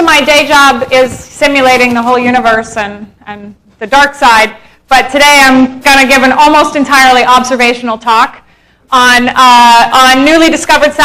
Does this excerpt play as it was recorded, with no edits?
yes; 0 cuts

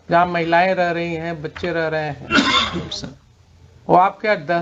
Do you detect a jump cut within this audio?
no; 0 cuts

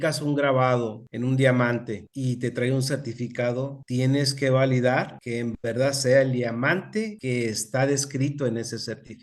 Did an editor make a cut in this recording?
no; 0 cuts

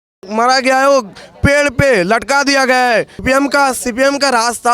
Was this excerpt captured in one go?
no; 1 cut; at 3.2 s

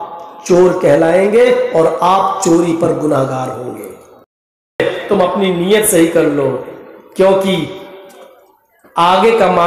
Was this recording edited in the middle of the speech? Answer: yes; 1 cut; at 4.8 s

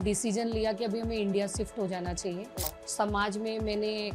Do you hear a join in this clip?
yes; 1 cut; at 2.8 s

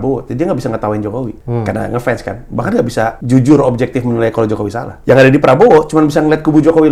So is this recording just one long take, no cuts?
no; 3 cuts; at 1.4 s, 3.2 s, 4.9 s

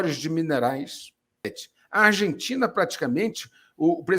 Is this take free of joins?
no; 1 cut; at 1.6 s

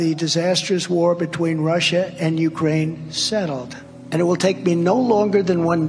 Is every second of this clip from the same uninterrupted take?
yes; 0 cuts

